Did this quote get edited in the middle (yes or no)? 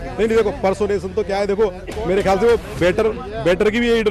no